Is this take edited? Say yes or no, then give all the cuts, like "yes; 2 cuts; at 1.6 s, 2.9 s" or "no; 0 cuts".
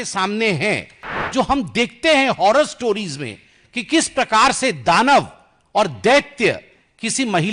yes; 1 cut; at 1.1 s